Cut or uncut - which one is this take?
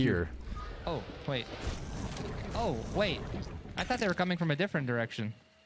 uncut